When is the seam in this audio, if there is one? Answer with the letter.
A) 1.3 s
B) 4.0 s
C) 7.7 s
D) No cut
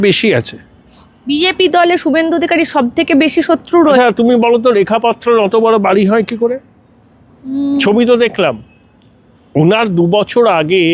B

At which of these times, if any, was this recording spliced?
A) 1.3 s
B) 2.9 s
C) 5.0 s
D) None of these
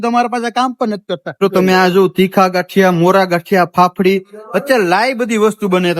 A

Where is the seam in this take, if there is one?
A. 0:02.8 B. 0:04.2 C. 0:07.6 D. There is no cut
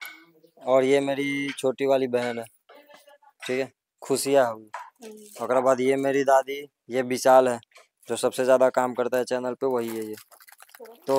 D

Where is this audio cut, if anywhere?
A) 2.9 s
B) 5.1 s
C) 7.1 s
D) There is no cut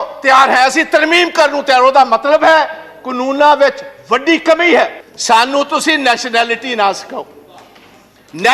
B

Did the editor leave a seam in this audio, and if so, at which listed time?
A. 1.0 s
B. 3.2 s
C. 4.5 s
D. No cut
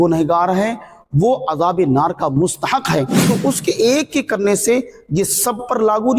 B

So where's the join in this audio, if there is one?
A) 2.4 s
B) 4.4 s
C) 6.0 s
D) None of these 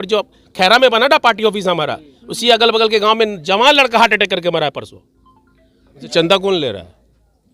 C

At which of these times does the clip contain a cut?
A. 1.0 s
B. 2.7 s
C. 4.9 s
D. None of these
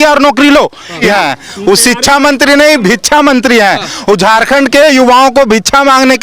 A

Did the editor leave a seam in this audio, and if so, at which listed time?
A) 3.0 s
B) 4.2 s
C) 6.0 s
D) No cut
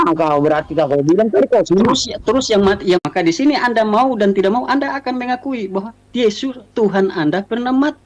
A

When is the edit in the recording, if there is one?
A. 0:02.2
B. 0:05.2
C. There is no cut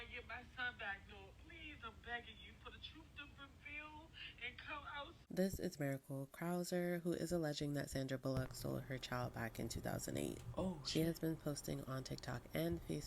B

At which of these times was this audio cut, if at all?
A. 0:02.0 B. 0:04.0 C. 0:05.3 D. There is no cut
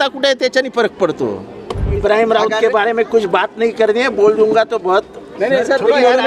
A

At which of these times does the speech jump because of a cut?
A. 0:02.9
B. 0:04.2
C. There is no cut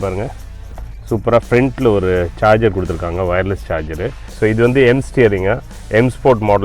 B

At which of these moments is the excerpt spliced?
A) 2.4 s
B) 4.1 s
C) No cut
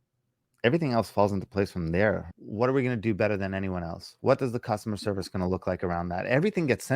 A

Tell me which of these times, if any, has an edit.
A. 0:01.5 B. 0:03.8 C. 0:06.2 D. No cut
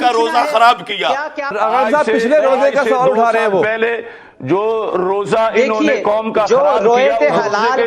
A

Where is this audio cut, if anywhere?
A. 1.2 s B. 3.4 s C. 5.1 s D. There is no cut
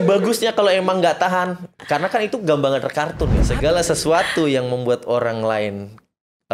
B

